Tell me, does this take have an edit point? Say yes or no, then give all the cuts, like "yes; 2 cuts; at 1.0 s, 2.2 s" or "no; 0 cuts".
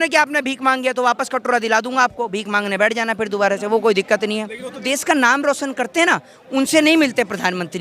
yes; 1 cut; at 4.7 s